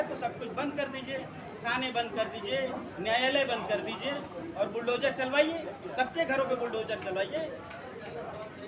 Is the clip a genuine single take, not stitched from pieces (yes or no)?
yes